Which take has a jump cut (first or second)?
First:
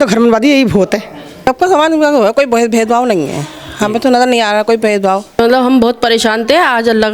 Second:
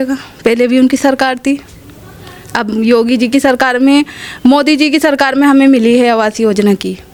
first